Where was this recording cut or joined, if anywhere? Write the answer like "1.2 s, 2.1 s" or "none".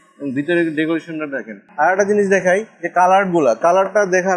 1.6 s